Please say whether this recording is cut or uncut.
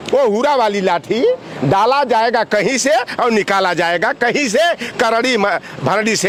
uncut